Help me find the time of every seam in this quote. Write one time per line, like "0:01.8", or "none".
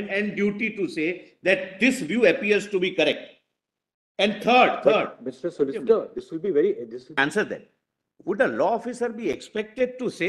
0:07.2